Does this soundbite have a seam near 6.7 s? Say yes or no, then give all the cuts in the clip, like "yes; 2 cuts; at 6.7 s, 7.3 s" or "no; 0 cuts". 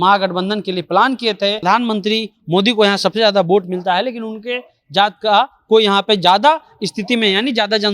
no; 1 cut; at 1.6 s